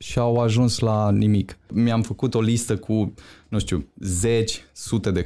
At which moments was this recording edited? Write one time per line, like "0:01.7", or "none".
0:01.7